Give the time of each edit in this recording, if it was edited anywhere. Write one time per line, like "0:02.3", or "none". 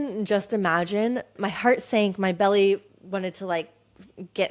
0:01.3